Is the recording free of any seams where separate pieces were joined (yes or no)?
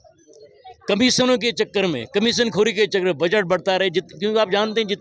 yes